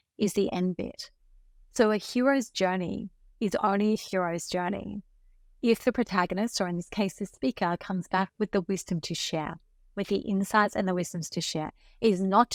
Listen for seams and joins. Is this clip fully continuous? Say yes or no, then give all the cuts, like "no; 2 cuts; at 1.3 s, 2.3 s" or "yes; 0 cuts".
yes; 0 cuts